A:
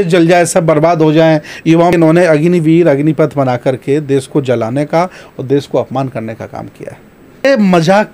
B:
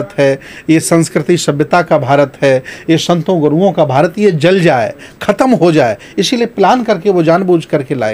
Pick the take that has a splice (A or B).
A